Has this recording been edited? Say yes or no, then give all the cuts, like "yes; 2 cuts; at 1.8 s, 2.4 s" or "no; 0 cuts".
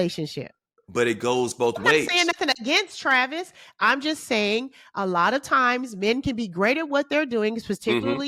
no; 0 cuts